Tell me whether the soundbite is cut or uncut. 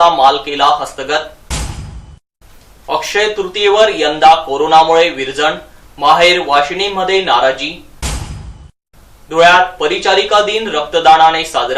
uncut